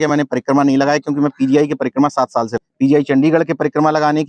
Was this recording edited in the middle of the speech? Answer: yes; 1 cut; at 2.6 s

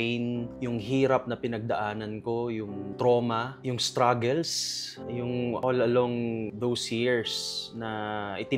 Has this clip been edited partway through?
no; 0 cuts

